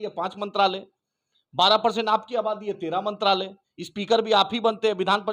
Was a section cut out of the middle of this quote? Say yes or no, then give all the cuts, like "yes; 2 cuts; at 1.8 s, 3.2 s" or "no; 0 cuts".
no; 0 cuts